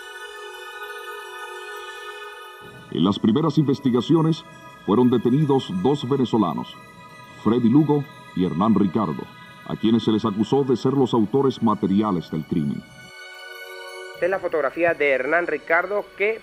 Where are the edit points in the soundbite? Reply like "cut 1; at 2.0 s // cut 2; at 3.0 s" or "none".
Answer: cut 1; at 1.5 s